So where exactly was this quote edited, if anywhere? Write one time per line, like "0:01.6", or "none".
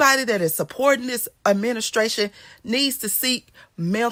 none